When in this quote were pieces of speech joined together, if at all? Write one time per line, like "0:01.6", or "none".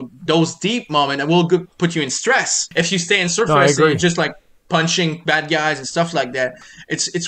0:02.6